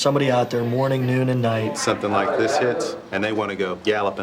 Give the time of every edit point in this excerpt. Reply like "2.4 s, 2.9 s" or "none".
1.8 s, 3.3 s